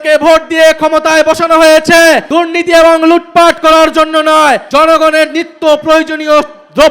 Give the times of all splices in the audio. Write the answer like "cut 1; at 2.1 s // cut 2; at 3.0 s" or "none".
cut 1; at 2.2 s // cut 2; at 4.6 s